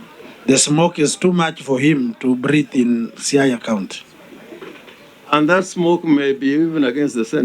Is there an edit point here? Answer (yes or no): no